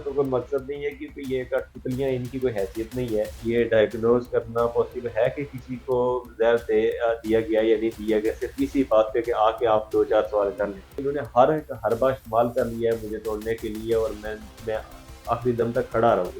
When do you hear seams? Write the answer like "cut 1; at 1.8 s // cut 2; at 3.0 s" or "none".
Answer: cut 1; at 3.4 s // cut 2; at 11.0 s